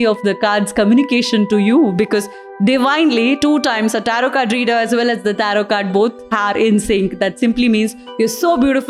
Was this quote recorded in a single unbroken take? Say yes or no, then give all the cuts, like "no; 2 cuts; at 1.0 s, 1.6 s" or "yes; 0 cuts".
yes; 0 cuts